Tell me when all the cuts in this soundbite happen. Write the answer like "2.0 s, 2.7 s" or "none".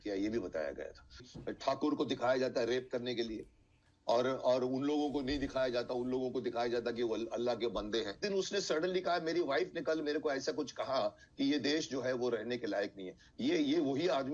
1.3 s, 8.2 s